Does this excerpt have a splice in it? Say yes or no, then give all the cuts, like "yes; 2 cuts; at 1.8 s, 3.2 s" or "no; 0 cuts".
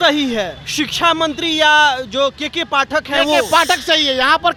no; 0 cuts